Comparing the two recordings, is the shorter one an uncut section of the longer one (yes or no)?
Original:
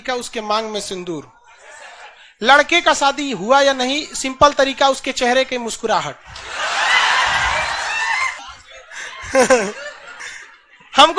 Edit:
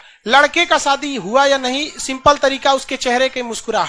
yes